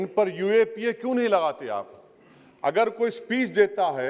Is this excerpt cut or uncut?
uncut